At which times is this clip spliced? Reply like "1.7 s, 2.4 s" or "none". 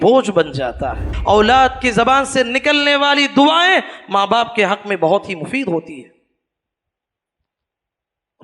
1.1 s